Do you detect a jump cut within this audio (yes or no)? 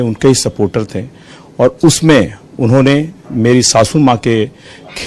no